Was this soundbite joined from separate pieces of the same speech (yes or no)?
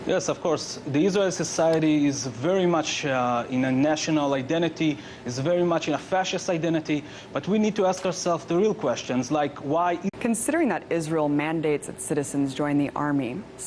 no